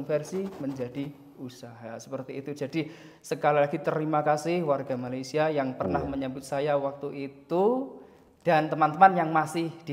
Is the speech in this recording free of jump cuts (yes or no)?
yes